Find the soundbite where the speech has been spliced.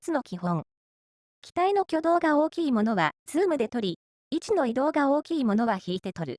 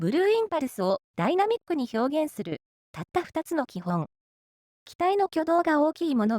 second; 1 cut; at 1.1 s

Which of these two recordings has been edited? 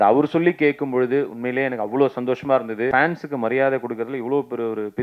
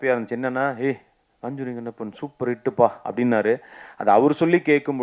first; 1 cut; at 2.9 s

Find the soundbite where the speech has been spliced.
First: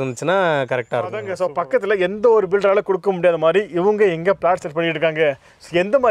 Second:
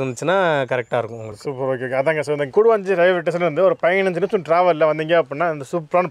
first; 1 cut; at 1.3 s

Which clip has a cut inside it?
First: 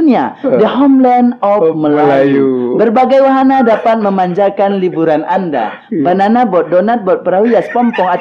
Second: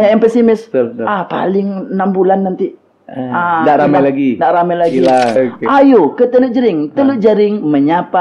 second; 1 cut; at 5.4 s

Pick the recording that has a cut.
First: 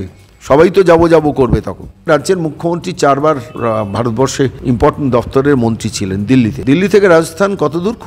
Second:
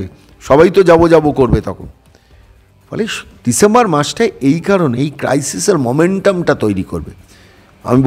first; 4 cuts; at 2.1 s, 3.5 s, 4.6 s, 6.6 s

